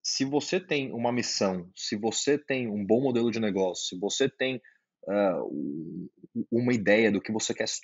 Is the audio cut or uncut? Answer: uncut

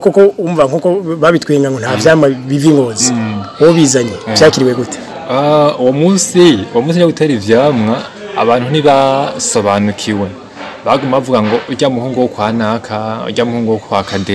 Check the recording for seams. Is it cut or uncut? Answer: uncut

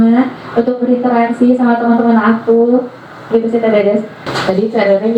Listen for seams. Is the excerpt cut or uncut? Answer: cut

